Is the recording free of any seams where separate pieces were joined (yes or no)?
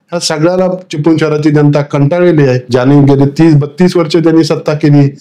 no